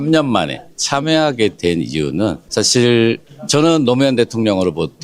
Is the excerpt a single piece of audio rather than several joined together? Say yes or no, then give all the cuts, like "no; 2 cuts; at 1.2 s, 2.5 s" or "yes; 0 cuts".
no; 2 cuts; at 2.4 s, 3.3 s